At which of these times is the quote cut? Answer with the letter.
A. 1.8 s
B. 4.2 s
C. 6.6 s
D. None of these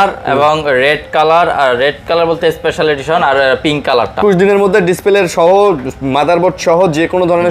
B